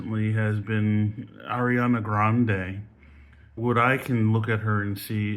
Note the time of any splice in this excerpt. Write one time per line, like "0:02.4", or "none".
0:03.5